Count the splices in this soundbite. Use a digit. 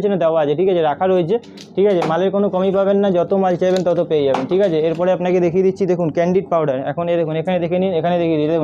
0